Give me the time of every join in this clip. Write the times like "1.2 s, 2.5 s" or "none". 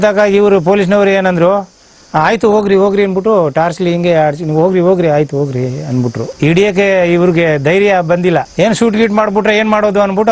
none